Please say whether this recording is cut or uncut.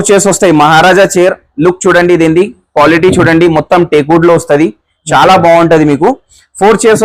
uncut